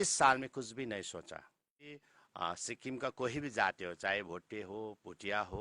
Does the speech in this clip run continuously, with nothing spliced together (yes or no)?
no